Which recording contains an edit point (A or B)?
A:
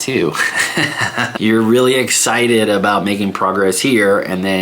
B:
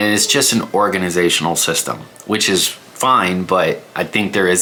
A